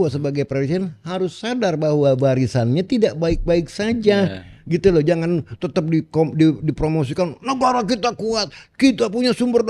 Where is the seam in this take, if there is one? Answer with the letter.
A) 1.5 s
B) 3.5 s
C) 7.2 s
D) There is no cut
D